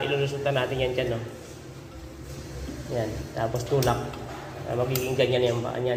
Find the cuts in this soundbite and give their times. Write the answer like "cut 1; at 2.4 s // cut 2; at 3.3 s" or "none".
none